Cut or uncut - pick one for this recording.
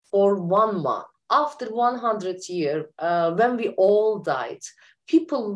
cut